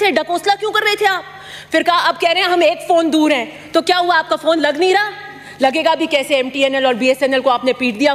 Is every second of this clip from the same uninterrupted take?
yes; 0 cuts

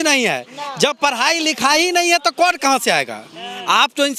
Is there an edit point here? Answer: no; 0 cuts

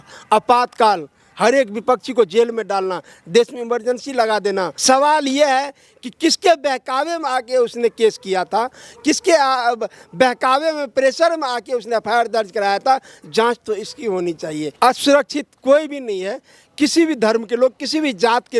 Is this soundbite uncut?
no; 2 cuts; at 4.7 s, 14.6 s

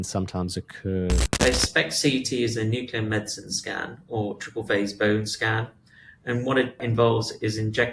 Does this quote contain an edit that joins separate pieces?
yes; 2 cuts; at 1.4 s, 6.8 s

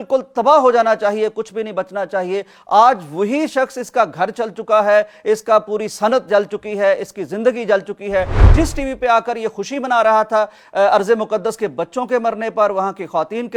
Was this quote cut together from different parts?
no; 0 cuts

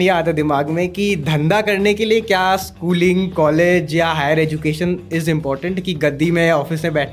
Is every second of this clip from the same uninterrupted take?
yes; 0 cuts

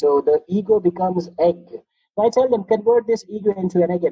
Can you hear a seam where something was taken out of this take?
no; 0 cuts

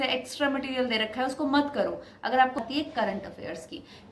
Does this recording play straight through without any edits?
no; 1 cut; at 2.6 s

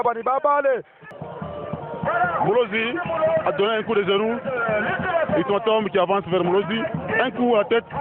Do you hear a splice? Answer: yes; 1 cut; at 1.1 s

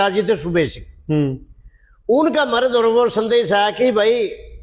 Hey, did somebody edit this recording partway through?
no; 0 cuts

